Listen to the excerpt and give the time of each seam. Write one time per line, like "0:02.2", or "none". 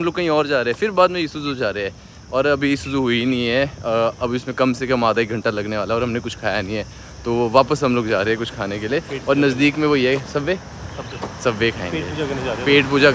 none